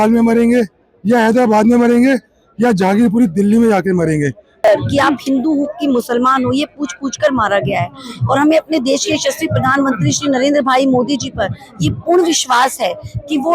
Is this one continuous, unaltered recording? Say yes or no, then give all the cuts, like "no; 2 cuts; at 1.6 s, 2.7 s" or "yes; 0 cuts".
no; 1 cut; at 4.6 s